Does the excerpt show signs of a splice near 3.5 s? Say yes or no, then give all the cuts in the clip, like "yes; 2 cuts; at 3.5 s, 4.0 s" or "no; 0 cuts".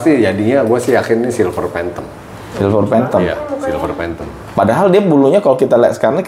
no; 0 cuts